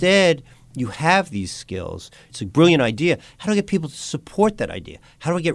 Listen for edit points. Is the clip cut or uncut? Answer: cut